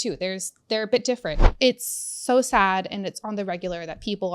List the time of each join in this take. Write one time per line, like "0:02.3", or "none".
0:01.4